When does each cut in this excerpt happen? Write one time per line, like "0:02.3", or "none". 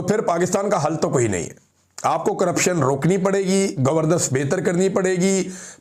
none